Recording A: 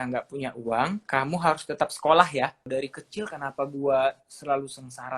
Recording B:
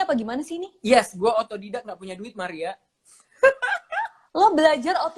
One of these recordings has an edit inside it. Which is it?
A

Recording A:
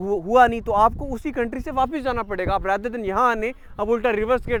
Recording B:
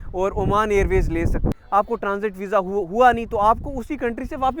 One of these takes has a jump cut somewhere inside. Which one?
B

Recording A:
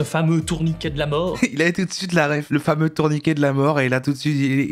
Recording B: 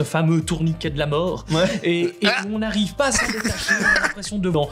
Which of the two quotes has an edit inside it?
A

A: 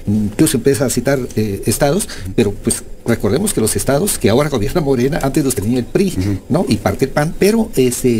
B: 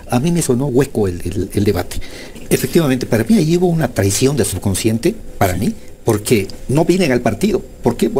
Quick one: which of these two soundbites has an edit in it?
B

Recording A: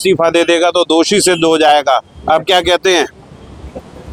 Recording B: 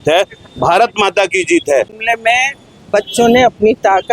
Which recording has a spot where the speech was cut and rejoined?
B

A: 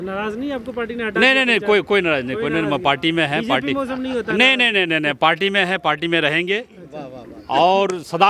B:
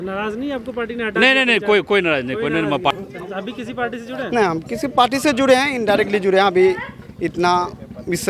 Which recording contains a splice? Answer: B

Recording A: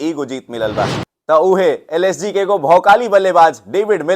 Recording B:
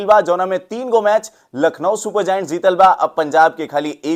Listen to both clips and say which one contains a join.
A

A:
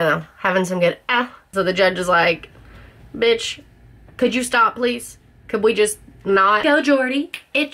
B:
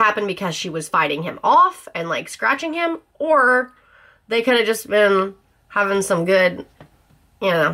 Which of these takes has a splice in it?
A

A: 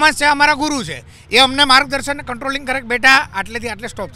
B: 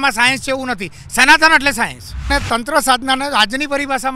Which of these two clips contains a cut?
B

